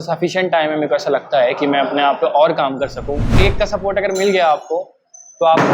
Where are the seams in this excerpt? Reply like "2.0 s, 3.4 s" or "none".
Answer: 3.4 s